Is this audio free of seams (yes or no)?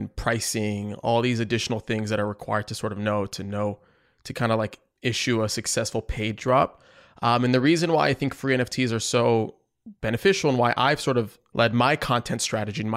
yes